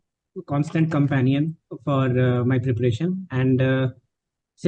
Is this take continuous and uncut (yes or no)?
yes